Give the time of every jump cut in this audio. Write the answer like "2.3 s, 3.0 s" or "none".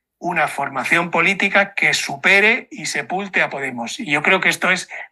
none